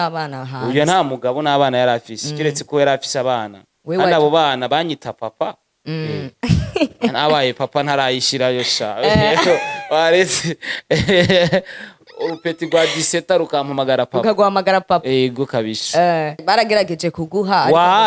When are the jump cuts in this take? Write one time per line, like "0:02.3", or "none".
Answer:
0:16.4